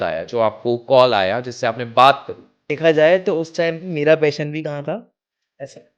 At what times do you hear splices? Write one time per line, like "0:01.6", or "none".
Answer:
0:02.7